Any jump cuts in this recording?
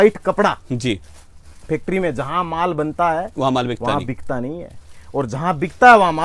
no; 0 cuts

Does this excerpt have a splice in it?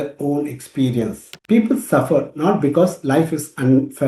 yes; 1 cut; at 1.3 s

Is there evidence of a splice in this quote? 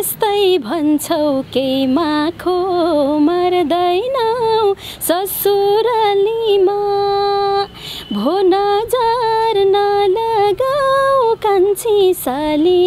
no; 0 cuts

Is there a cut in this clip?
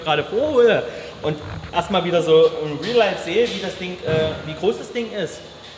no; 0 cuts

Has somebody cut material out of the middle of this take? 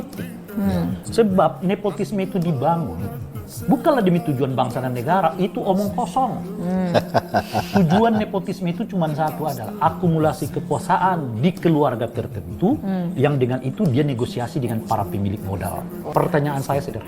yes; 1 cut; at 16.0 s

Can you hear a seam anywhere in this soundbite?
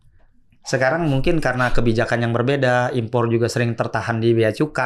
no; 0 cuts

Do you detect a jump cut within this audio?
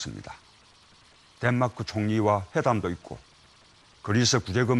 no; 0 cuts

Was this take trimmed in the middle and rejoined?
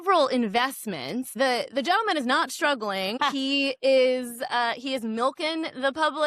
yes; 2 cuts; at 1.3 s, 3.2 s

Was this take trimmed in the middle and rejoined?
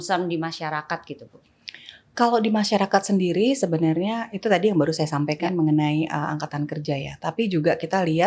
no; 0 cuts

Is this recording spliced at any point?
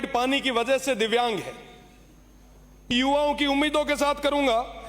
yes; 1 cut; at 2.9 s

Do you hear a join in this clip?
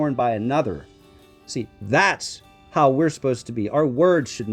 no; 0 cuts

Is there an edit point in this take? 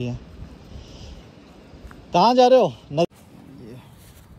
yes; 1 cut; at 3.1 s

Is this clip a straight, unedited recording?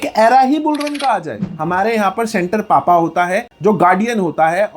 no; 1 cut; at 1.4 s

